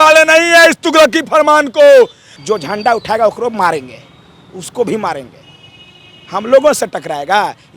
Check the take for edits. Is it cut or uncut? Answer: cut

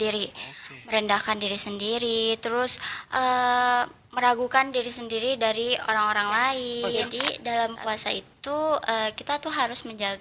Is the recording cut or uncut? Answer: cut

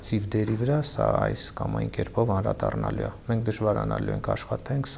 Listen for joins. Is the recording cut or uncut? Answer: uncut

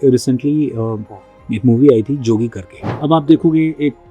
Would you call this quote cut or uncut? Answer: cut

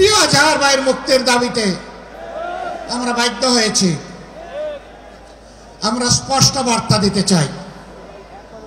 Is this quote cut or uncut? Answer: uncut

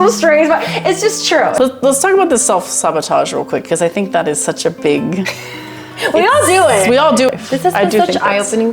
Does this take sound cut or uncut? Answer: cut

